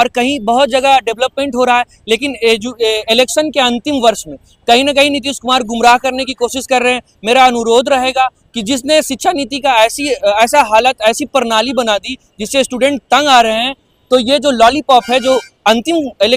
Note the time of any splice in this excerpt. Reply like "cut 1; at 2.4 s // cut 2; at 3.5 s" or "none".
none